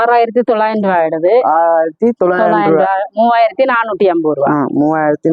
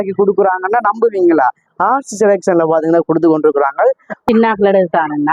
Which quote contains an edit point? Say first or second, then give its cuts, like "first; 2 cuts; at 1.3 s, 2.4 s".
second; 1 cut; at 4.1 s